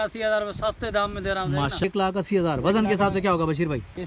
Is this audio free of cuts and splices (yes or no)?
no